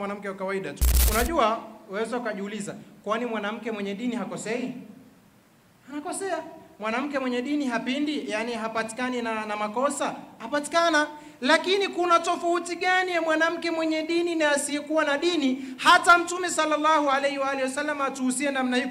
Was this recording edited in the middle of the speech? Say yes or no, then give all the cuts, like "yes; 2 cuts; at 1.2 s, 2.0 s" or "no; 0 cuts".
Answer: yes; 1 cut; at 0.9 s